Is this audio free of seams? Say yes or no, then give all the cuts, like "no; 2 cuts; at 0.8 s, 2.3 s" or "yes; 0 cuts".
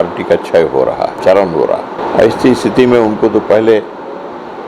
no; 2 cuts; at 1.1 s, 2.0 s